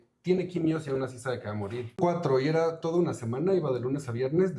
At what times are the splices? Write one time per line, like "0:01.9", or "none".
0:02.0